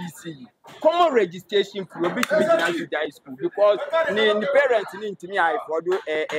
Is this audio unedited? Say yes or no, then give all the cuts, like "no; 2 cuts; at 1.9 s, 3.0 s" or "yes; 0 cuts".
yes; 0 cuts